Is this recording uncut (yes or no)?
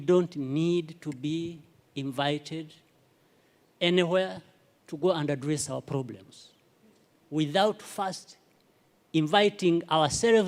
yes